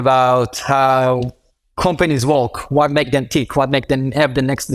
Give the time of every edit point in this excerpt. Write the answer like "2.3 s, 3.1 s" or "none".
none